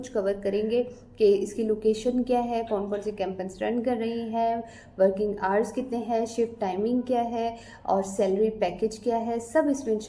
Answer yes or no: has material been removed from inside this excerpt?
no